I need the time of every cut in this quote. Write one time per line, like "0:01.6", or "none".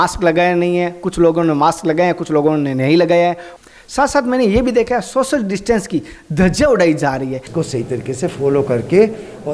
0:07.5